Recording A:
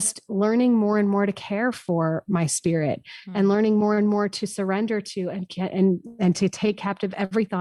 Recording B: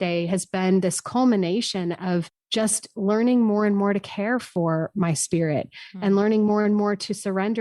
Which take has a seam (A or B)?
B